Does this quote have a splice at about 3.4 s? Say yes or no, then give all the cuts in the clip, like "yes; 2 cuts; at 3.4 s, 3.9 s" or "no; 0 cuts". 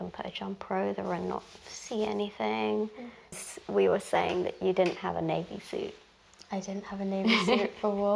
yes; 1 cut; at 3.4 s